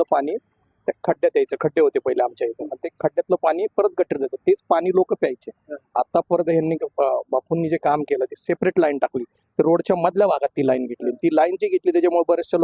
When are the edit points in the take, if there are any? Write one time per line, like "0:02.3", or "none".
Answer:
none